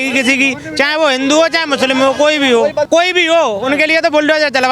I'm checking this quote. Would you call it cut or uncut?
cut